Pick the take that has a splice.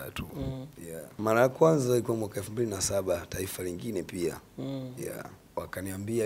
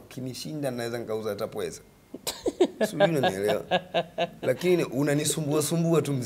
first; 2 cuts; at 1.2 s, 5.4 s

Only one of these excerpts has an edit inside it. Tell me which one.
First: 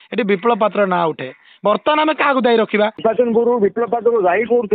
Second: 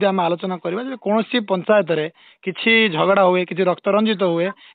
first; 1 cut; at 3.0 s

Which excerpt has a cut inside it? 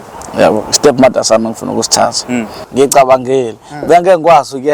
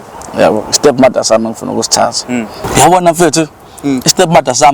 first; 1 cut; at 2.6 s

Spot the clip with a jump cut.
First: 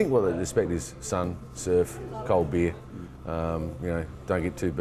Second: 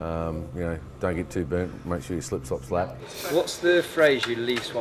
second; 1 cut; at 3.1 s

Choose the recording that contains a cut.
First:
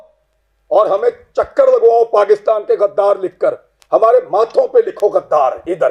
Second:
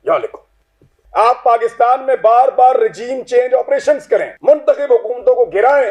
second; 1 cut; at 1.0 s

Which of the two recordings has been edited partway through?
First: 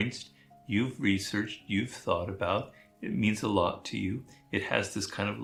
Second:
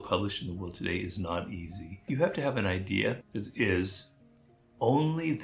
second; 2 cuts; at 1.9 s, 3.2 s

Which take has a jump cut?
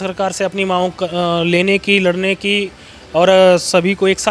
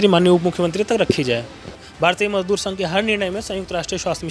second; 1 cut; at 1.9 s

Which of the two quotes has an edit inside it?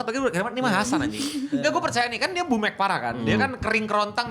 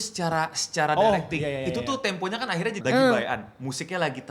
second; 1 cut; at 2.8 s

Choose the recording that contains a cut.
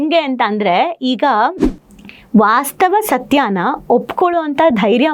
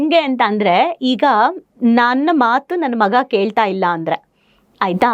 first; 1 cut; at 1.7 s

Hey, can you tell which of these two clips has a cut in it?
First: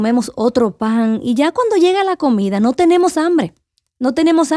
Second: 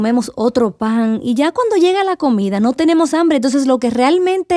second; 1 cut; at 2.7 s

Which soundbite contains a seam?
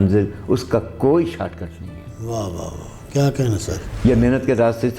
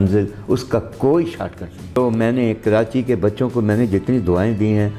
second; 1 cut; at 2.0 s

